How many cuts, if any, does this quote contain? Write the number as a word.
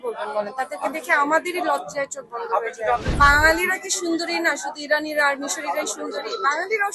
one